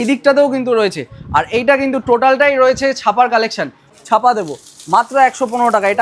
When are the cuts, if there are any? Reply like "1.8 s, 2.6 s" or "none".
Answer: 3.9 s